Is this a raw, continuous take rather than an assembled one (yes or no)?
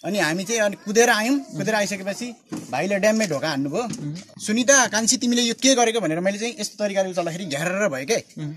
no